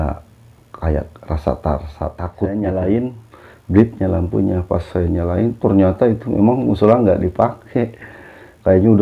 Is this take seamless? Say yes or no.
no